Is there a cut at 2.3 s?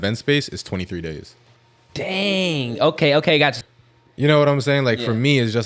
no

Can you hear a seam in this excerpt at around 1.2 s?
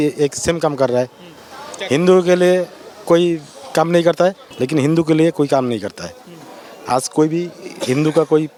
no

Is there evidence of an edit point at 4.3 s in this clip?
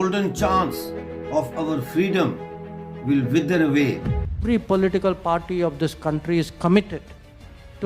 yes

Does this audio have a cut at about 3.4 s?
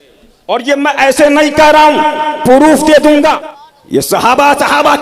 yes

